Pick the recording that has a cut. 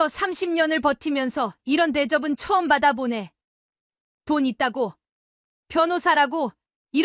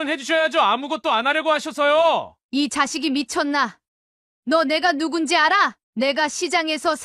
second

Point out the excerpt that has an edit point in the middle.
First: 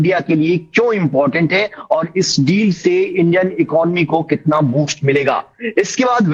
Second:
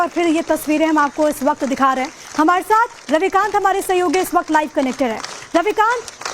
second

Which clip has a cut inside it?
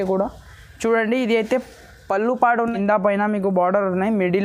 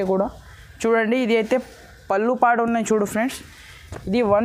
first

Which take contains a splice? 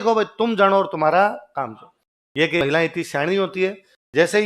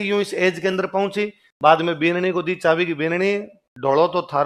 first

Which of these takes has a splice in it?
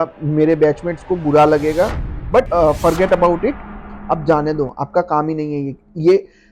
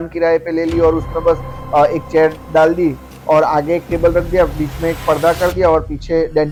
first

